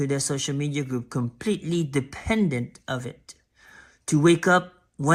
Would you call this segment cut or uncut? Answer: uncut